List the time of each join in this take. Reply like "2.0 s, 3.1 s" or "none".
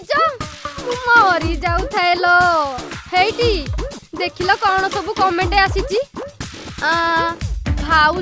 2.7 s